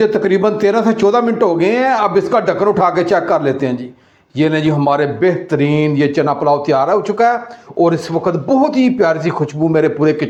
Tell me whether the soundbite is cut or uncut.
uncut